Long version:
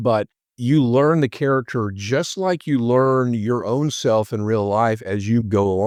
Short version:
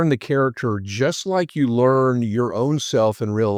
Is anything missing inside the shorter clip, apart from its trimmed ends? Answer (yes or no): no